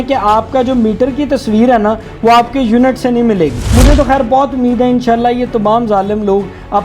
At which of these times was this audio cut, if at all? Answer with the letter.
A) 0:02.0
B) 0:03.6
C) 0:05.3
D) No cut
B